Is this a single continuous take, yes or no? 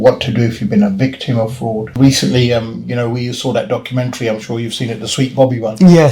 no